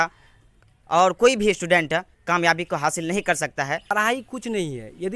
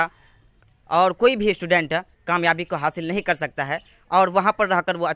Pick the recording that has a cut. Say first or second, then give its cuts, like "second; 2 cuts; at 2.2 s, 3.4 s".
first; 1 cut; at 4.1 s